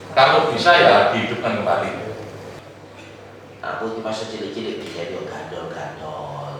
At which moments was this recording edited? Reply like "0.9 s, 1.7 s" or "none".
2.6 s